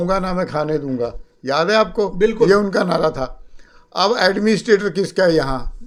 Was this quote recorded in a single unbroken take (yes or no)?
yes